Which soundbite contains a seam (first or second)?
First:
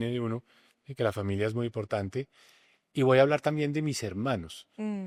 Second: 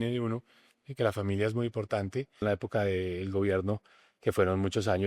second